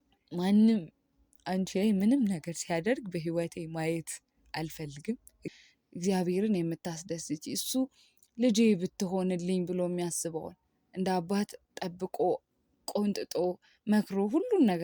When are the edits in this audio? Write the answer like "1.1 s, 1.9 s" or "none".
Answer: 5.5 s

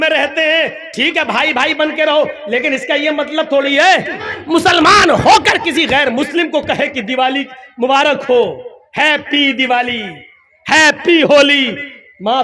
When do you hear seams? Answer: 4.2 s

